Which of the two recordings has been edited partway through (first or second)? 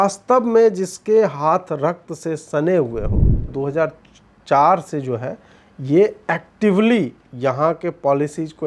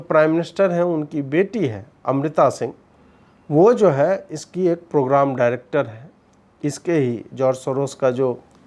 first